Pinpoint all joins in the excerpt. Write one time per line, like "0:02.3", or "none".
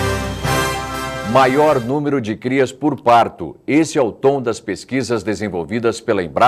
0:00.9